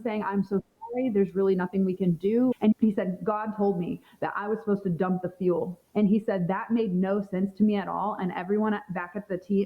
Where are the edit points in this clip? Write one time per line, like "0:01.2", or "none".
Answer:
0:02.5
0:08.2